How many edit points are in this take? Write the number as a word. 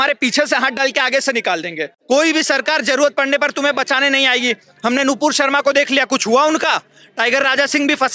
one